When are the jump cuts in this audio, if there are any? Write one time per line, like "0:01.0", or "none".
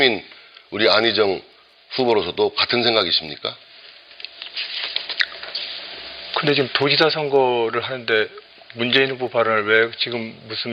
0:06.4

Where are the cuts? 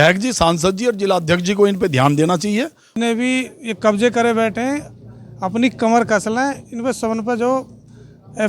0:02.9

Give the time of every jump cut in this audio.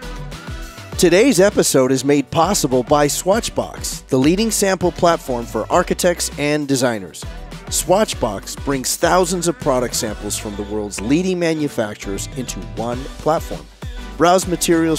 0:01.0

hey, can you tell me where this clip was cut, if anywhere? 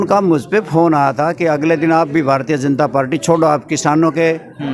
none

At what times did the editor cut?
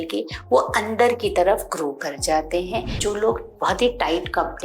0:03.0

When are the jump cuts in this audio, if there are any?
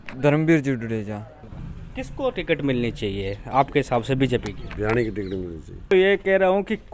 0:01.4
0:05.9

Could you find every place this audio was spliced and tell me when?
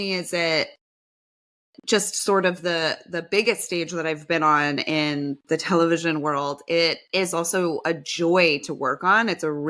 none

